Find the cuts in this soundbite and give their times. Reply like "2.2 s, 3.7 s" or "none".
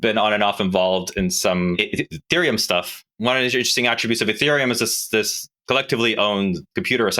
1.8 s, 3.1 s, 5.5 s